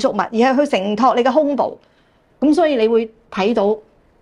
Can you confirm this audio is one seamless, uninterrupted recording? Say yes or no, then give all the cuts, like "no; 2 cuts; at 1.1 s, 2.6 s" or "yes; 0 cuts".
no; 1 cut; at 2.2 s